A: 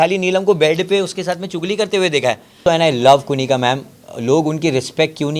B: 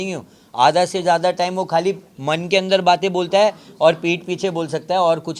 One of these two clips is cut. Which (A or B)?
A